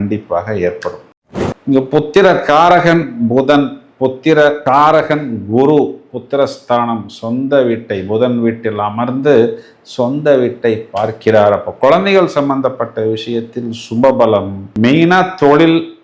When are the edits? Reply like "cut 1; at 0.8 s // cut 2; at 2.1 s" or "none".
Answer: cut 1; at 1.0 s